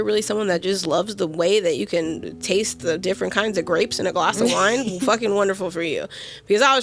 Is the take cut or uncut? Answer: uncut